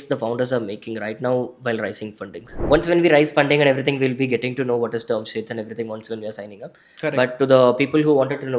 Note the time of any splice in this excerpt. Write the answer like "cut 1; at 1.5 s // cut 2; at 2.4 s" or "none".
cut 1; at 2.6 s